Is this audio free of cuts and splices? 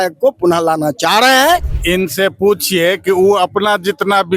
no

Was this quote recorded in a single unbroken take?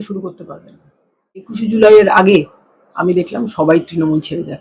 no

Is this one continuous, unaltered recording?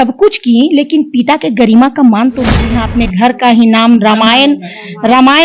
no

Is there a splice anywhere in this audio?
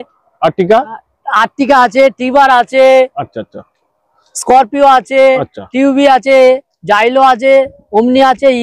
no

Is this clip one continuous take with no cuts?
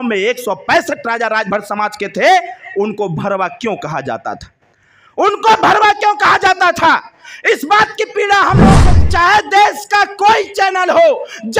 no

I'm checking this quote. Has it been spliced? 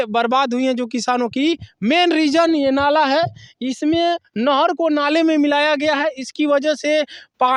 no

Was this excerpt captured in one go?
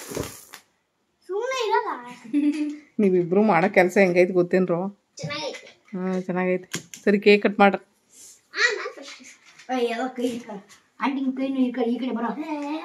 yes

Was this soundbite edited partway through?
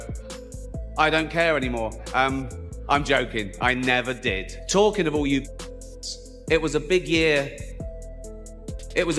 yes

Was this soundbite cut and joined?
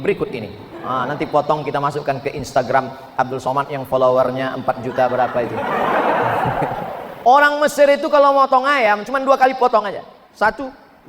yes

